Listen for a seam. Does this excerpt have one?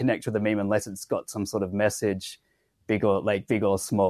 no; 0 cuts

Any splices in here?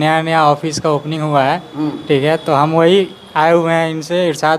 no; 0 cuts

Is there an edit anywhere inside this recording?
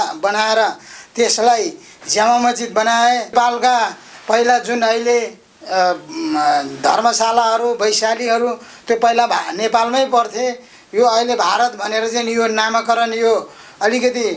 yes; 1 cut; at 3.3 s

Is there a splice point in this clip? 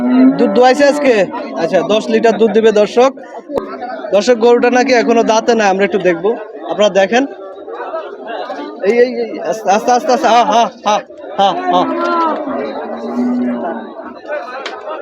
yes; 1 cut; at 3.5 s

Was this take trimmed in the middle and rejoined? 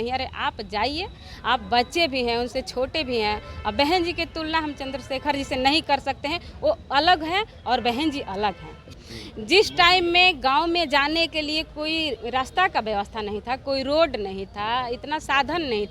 yes; 1 cut; at 8.9 s

